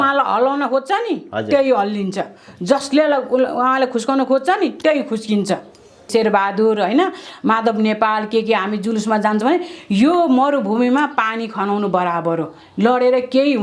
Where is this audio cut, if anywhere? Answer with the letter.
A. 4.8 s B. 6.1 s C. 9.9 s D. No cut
B